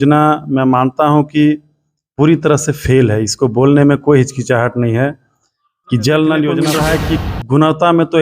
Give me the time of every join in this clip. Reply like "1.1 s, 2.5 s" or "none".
6.7 s